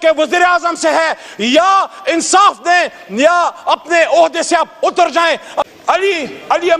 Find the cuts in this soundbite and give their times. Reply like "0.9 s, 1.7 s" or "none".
5.5 s